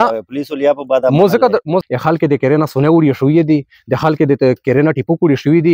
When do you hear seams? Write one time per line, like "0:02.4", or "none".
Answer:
0:01.8